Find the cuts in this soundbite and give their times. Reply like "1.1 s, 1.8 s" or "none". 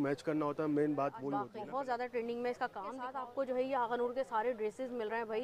1.5 s, 3.1 s